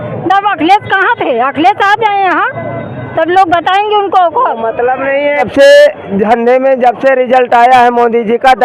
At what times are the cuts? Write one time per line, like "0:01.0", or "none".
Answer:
0:05.5